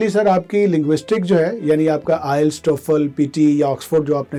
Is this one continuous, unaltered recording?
yes; 0 cuts

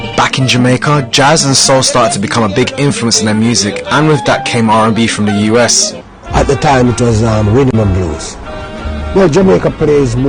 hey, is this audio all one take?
yes; 0 cuts

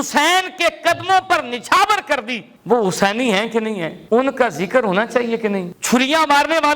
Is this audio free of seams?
no; 2 cuts; at 4.0 s, 5.7 s

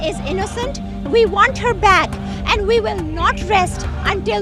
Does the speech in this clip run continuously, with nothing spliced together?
yes; 0 cuts

